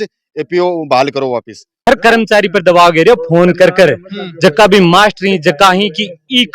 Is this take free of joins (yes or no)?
no